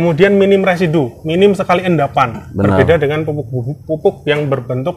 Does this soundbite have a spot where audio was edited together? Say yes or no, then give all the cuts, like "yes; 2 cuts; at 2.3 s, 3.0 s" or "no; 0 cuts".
no; 0 cuts